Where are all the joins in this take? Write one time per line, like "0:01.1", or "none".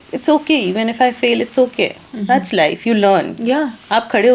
none

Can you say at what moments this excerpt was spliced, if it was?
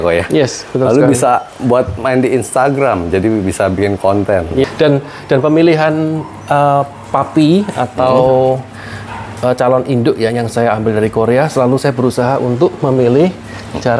0:04.7

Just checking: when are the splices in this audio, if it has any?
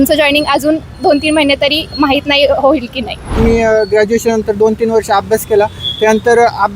0:03.4

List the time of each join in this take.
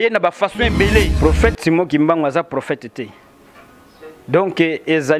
0:01.1

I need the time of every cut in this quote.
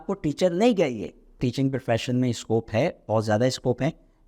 0:01.4

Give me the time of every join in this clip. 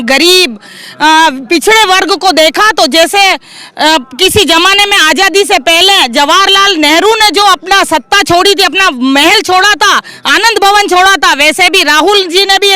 none

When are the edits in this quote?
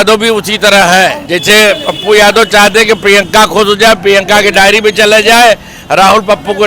0:01.2

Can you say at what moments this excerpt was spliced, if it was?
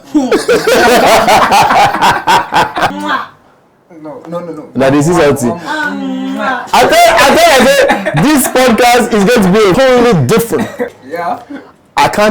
0:02.9
0:09.7
0:10.9

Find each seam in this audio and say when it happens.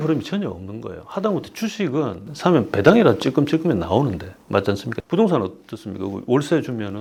none

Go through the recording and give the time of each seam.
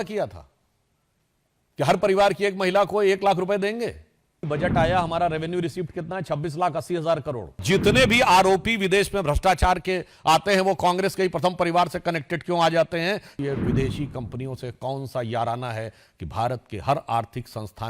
0:04.4
0:07.6
0:13.3

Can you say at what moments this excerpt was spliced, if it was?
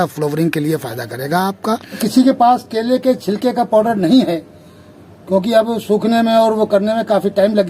0:02.0

